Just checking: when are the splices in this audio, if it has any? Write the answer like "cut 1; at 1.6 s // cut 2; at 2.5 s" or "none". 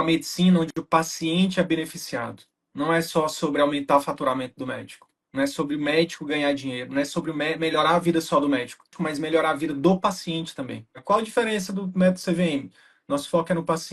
cut 1; at 11.0 s